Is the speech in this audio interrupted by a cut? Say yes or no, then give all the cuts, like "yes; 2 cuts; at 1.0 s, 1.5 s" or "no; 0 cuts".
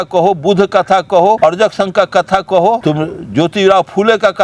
yes; 2 cuts; at 1.4 s, 2.8 s